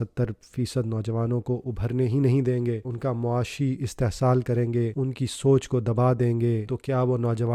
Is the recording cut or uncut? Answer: cut